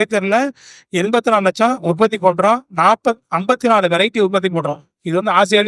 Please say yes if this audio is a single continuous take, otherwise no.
yes